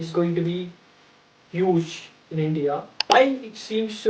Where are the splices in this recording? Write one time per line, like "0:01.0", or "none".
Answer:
0:03.1